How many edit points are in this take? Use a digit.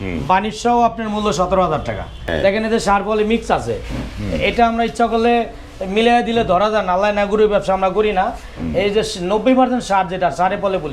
1